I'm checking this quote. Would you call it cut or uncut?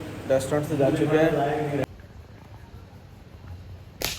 cut